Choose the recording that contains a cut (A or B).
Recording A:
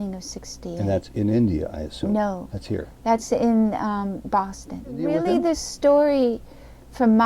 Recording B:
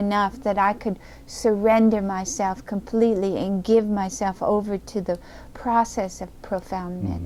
A